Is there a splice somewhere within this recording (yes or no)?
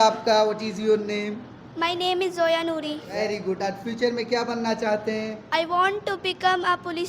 yes